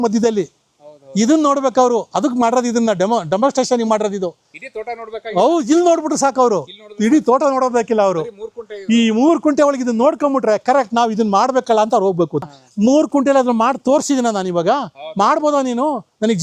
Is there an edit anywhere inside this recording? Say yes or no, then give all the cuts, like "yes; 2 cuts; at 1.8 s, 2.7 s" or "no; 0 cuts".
yes; 1 cut; at 12.4 s